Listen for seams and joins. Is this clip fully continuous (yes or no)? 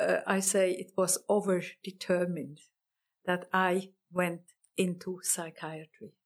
no